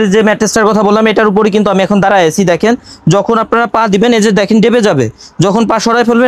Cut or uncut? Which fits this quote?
uncut